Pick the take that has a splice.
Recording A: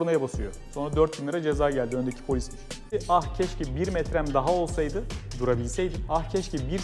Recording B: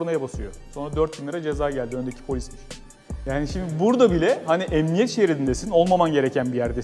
A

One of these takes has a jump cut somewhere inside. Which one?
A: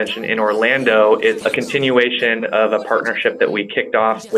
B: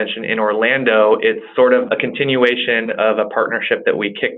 A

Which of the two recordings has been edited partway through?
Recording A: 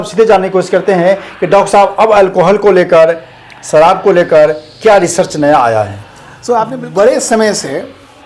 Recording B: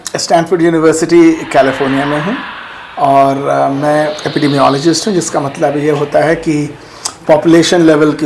A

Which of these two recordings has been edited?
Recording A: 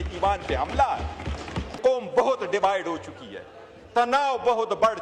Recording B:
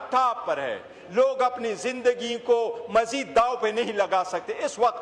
A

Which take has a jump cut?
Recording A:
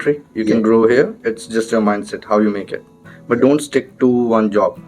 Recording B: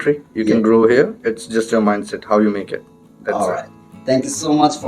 A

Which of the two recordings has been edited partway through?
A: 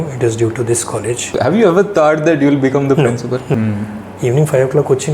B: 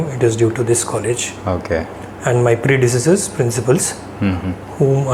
A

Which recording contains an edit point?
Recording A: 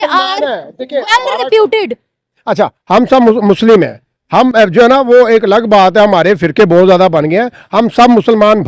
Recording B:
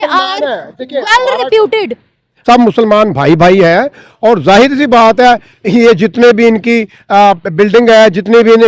B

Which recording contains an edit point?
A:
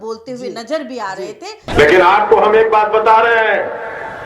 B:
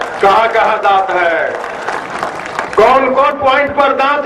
A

